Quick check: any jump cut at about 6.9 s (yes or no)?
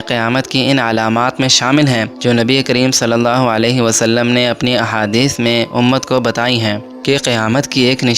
yes